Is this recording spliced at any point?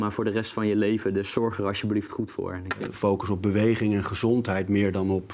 no; 0 cuts

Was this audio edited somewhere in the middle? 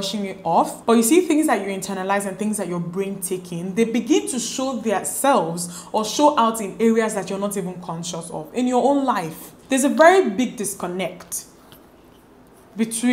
yes; 1 cut; at 9.5 s

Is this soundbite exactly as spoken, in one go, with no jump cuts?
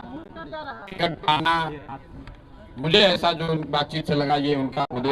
yes; 0 cuts

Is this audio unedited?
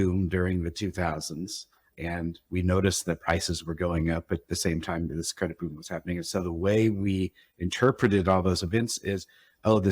no; 1 cut; at 1.9 s

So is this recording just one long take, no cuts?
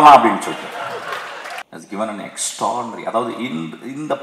no; 1 cut; at 1.5 s

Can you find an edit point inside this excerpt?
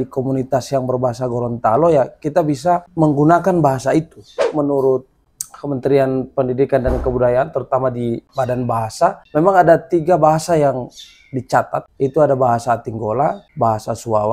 yes; 6 cuts; at 2.9 s, 4.5 s, 8.2 s, 9.2 s, 11.9 s, 13.4 s

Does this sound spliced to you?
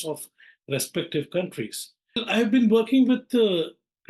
yes; 1 cut; at 2.2 s

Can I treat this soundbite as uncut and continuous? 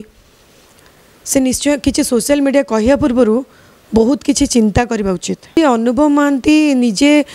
no; 1 cut; at 5.5 s

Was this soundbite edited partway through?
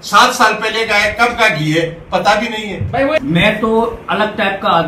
yes; 1 cut; at 3.2 s

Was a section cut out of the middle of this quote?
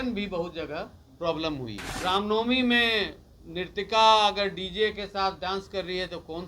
yes; 1 cut; at 1.8 s

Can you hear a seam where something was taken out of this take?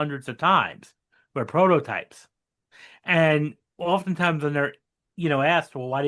no; 0 cuts

